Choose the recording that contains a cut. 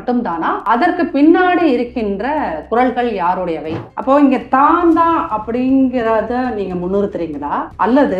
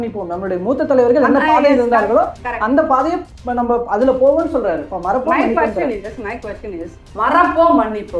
first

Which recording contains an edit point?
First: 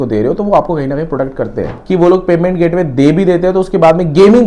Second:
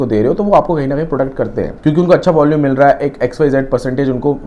first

